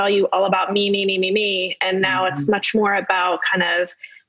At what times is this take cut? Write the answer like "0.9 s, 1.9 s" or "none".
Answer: none